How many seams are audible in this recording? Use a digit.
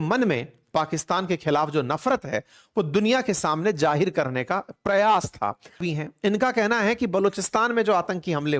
1